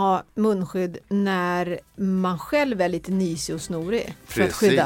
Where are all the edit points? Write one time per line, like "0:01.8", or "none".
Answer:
none